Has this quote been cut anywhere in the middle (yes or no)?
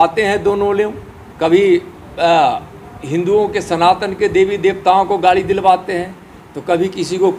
no